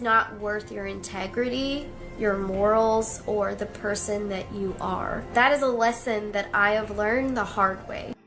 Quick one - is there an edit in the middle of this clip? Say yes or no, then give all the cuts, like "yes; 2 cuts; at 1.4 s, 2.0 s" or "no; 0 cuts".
no; 0 cuts